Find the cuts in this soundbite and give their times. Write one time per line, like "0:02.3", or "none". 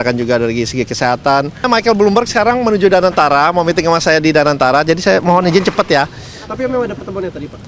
0:01.7